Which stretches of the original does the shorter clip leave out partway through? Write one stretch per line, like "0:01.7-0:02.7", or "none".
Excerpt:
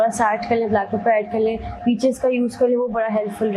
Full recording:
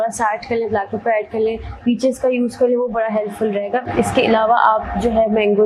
none